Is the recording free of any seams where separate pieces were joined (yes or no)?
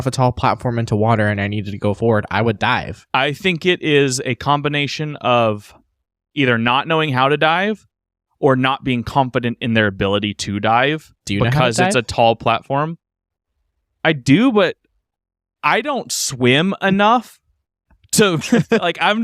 no